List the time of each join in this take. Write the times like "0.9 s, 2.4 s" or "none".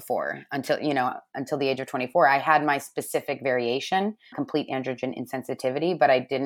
4.2 s